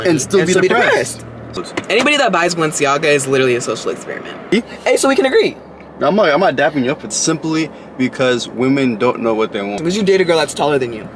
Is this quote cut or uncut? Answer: cut